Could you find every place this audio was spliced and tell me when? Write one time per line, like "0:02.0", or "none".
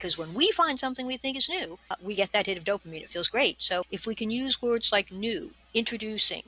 0:01.9
0:03.9
0:05.6